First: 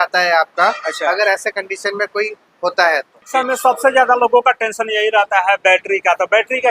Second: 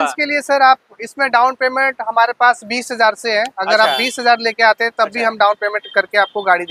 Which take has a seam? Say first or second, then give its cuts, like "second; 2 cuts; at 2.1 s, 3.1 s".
first; 1 cut; at 3.2 s